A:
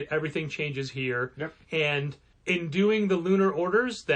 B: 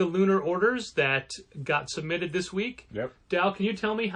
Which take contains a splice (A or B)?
A